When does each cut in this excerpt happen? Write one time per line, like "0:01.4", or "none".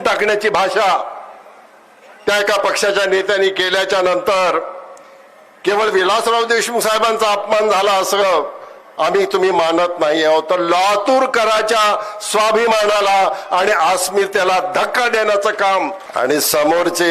0:16.0